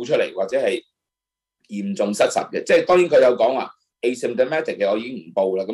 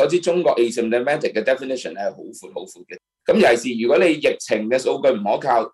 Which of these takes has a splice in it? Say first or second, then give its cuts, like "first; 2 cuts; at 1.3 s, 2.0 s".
second; 1 cut; at 2.8 s